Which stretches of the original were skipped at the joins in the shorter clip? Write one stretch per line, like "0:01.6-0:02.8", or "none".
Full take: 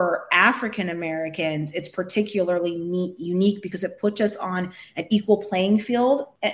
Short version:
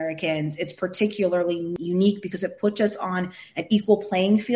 0:02.9-0:03.1